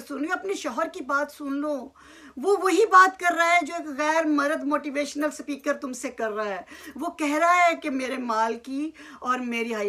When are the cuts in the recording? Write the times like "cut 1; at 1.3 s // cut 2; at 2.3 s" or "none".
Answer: none